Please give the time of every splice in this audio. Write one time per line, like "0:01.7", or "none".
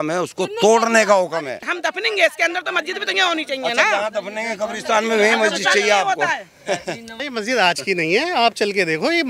0:01.7
0:07.2